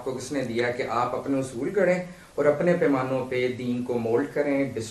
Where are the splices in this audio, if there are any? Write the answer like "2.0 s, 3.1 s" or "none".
none